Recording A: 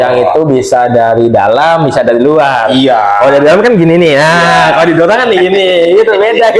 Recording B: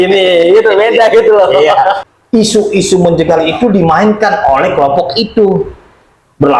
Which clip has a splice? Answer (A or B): B